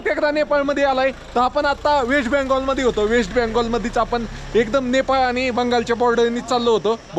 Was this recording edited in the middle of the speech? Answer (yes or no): no